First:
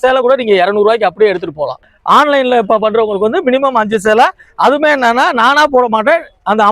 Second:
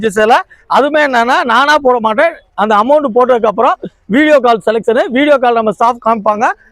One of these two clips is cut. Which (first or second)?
first